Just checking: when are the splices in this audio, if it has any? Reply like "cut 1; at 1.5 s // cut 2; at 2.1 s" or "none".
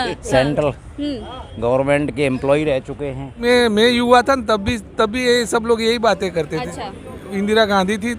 cut 1; at 3.4 s